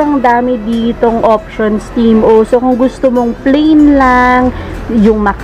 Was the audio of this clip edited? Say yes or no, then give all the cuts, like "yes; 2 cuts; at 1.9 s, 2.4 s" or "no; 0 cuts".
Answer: no; 0 cuts